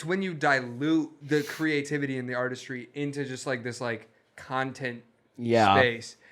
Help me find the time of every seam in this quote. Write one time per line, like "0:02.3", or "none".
0:01.2